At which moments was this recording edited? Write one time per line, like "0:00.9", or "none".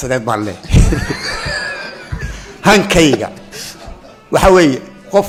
none